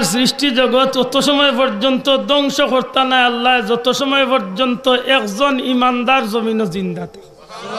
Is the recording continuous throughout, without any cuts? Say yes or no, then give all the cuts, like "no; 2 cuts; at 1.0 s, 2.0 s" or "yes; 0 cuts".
yes; 0 cuts